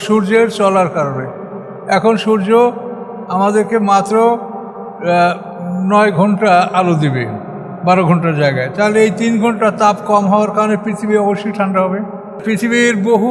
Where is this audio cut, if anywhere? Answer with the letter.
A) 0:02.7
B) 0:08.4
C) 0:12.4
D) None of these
C